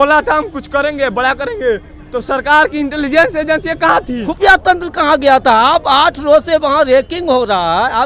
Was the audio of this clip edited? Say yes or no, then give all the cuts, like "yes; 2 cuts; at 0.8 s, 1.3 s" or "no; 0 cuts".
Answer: yes; 1 cut; at 4.3 s